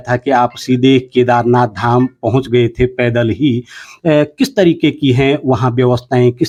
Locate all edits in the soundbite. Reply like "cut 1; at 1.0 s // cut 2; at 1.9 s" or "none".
none

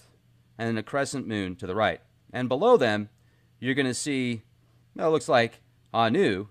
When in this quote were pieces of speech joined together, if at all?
cut 1; at 5.1 s

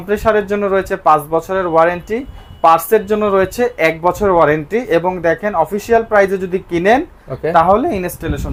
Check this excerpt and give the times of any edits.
none

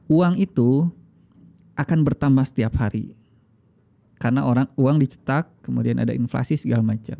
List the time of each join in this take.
none

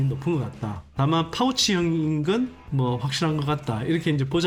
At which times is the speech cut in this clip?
none

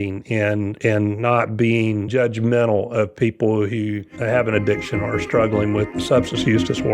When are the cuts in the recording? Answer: cut 1; at 4.1 s // cut 2; at 5.9 s

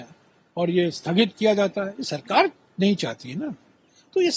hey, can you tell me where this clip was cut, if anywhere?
none

